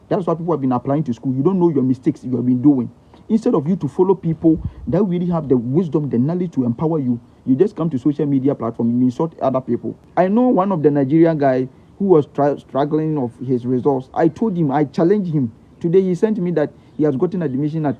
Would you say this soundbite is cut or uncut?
cut